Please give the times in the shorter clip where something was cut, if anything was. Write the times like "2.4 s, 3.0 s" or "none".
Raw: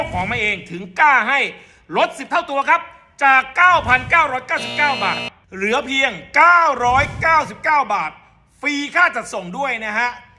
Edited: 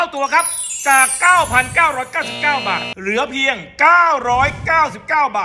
2.9 s